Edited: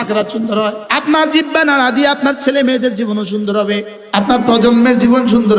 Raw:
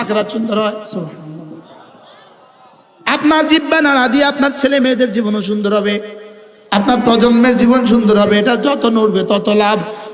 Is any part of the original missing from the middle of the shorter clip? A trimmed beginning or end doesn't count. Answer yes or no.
yes